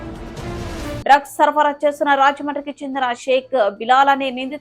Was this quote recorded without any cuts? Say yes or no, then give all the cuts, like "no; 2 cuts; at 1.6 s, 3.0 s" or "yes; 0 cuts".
no; 1 cut; at 1.0 s